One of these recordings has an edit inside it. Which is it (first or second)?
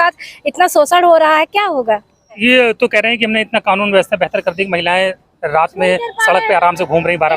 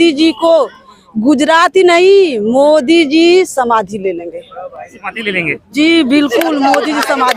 first